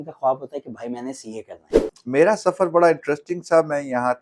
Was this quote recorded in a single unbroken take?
no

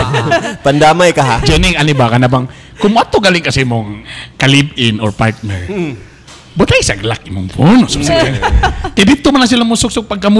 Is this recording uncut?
yes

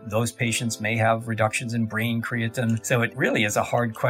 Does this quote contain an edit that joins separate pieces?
yes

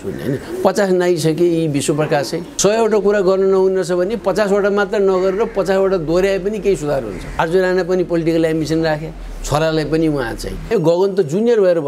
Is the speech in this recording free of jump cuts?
no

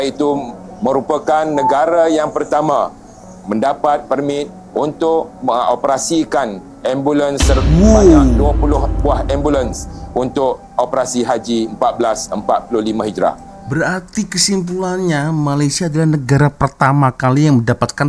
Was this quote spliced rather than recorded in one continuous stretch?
no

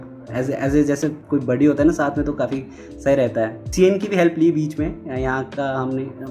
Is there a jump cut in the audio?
yes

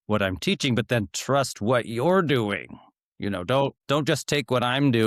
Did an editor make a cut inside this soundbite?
yes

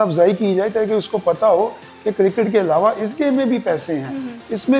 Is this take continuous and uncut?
yes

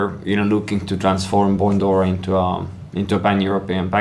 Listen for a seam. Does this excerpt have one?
no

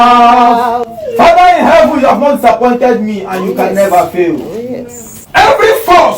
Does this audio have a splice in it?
no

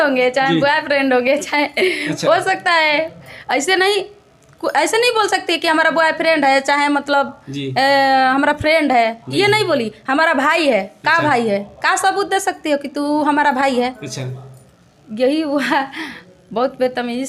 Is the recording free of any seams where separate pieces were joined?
yes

